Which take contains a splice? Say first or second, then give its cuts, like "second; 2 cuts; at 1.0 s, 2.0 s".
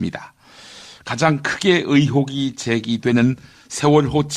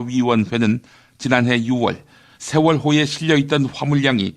first; 1 cut; at 1.5 s